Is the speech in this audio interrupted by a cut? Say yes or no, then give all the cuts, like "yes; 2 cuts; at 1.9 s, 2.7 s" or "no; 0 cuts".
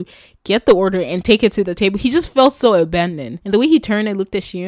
yes; 1 cut; at 3.3 s